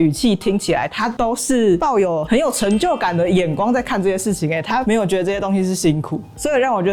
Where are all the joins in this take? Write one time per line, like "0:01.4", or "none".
none